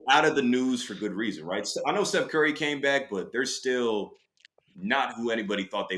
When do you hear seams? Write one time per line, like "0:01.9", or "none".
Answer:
none